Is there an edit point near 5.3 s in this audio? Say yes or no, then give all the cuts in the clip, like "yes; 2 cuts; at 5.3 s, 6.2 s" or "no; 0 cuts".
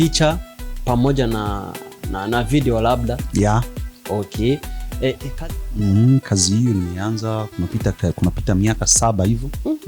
yes; 1 cut; at 5.3 s